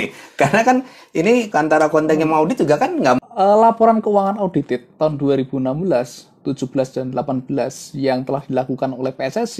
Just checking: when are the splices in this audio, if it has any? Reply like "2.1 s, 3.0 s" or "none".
1.5 s, 3.2 s